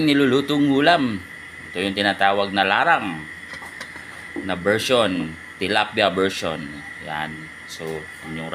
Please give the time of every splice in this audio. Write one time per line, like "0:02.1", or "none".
none

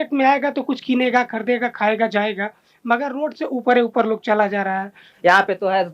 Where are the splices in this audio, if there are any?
0:05.0

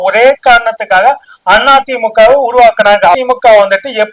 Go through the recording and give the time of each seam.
0:03.1

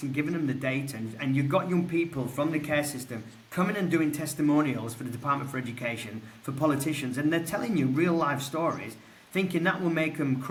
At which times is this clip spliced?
none

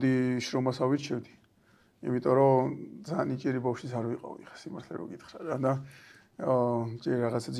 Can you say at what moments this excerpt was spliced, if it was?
none

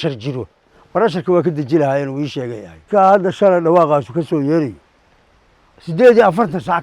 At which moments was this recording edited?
0:02.9

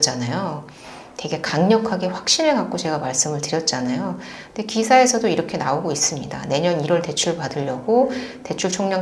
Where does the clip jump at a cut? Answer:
none

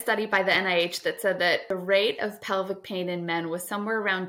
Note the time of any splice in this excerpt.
0:01.7

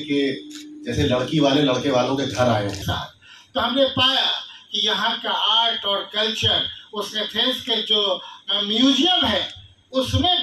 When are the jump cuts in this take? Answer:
0:02.8

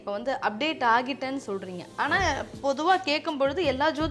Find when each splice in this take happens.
none

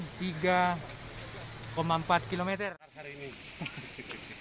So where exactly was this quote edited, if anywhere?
0:02.6

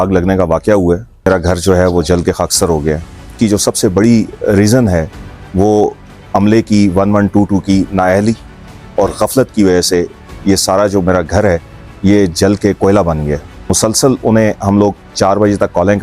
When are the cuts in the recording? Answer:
0:01.3
0:03.3
0:13.5

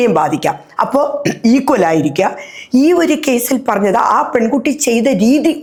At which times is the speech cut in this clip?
none

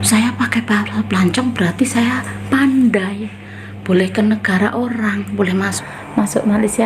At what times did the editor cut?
0:05.7

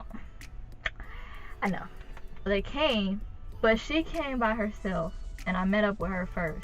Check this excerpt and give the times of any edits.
0:02.4

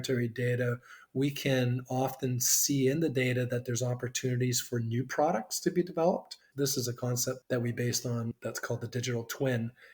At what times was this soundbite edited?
0:06.5
0:07.4

